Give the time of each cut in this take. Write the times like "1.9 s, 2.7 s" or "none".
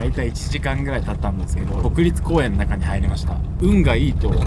3.4 s